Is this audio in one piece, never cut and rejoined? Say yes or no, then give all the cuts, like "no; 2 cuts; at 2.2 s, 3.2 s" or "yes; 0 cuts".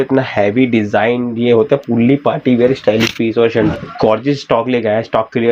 no; 1 cut; at 3.7 s